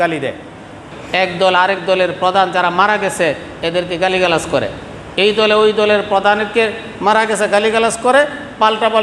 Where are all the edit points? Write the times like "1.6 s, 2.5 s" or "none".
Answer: 0.9 s

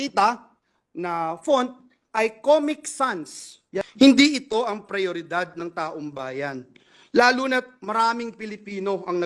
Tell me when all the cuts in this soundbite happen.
3.9 s

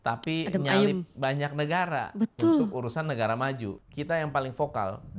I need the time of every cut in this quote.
3.8 s

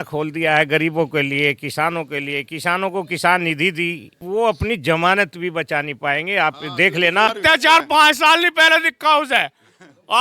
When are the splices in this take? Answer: 4.2 s, 7.4 s

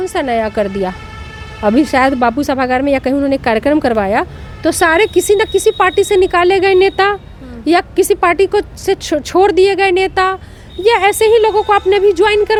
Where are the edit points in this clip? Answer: none

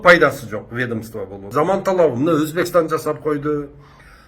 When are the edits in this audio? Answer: 1.4 s

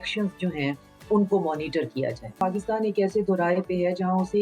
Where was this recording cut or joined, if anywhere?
2.3 s

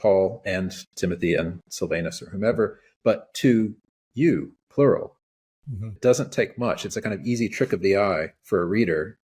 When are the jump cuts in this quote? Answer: 5.9 s

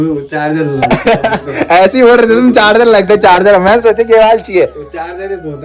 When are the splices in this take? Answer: none

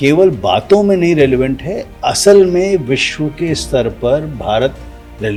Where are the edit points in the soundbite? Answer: none

